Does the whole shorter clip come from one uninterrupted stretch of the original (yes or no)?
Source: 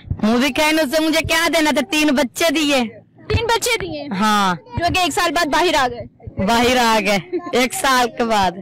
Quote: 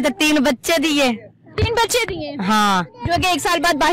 yes